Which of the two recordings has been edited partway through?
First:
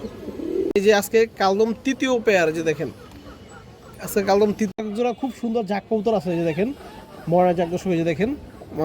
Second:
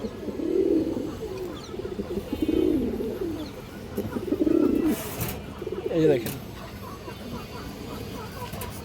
first; 2 cuts; at 0.7 s, 4.7 s

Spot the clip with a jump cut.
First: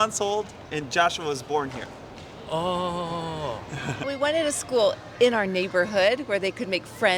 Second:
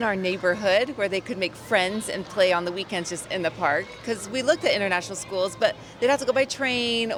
first; 1 cut; at 4.1 s

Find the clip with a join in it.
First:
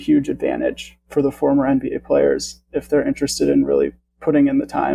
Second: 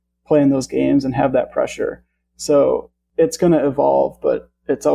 second; 1 cut; at 3.0 s

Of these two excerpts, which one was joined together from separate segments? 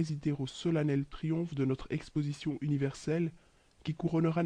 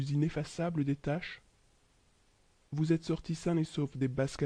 first; 1 cut; at 3.2 s

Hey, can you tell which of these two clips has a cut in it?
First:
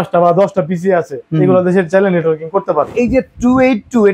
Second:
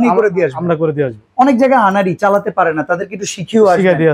first; 2 cuts; at 1.2 s, 2.9 s

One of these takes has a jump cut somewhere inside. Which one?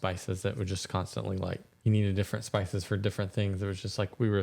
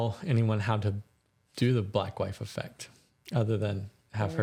first; 1 cut; at 1.7 s

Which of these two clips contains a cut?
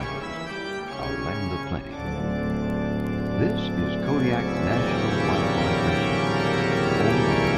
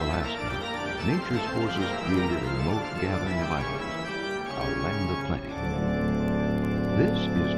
first; 1 cut; at 5.7 s

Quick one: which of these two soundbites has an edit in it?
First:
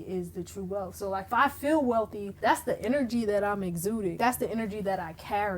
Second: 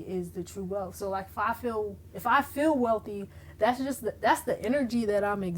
first; 3 cuts; at 1.3 s, 2.3 s, 4.2 s

